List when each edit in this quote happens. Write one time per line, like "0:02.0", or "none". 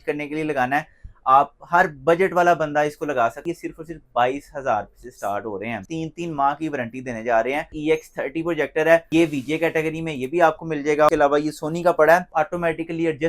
0:03.4
0:05.9
0:07.7
0:09.1
0:11.1
0:12.3